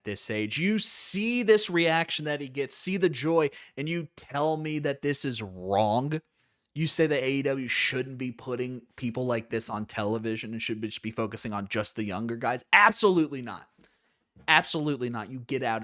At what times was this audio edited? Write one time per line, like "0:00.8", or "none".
none